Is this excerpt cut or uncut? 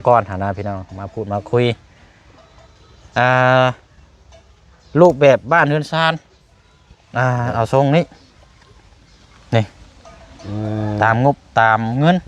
uncut